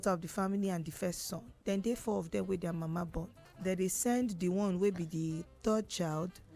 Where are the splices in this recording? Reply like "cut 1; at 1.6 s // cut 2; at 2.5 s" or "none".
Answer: cut 1; at 1.5 s // cut 2; at 3.4 s